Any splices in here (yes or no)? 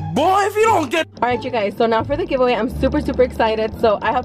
yes